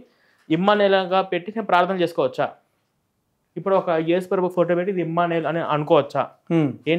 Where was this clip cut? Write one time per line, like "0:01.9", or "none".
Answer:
none